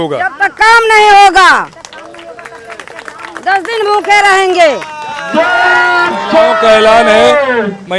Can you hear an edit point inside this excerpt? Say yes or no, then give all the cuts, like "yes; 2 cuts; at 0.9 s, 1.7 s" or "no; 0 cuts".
no; 0 cuts